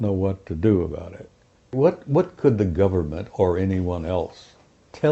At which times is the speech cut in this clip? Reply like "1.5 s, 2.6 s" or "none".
1.7 s